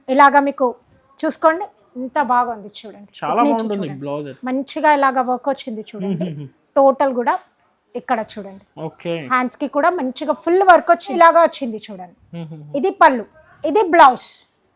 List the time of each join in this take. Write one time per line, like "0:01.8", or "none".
0:11.2

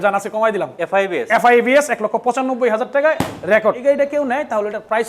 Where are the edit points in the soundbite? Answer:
0:03.8

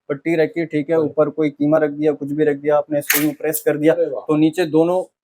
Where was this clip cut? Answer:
none

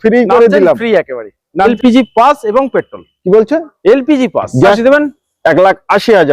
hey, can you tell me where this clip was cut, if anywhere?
0:01.7
0:04.8

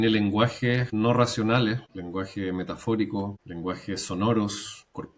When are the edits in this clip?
0:00.9
0:01.9
0:03.4

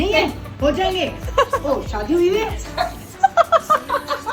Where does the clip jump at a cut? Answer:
none

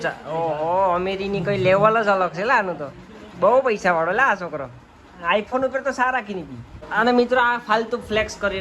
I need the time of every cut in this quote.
none

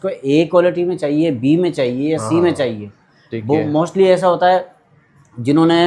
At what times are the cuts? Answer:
none

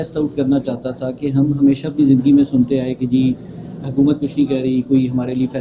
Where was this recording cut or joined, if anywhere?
none

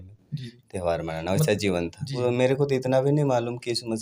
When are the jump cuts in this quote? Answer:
0:02.0

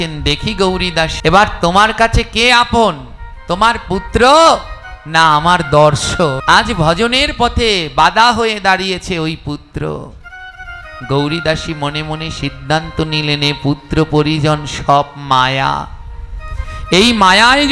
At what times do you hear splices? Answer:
0:01.1
0:06.4

